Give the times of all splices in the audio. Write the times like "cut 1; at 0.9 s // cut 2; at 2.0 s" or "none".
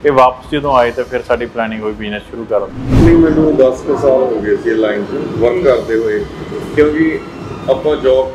cut 1; at 2.9 s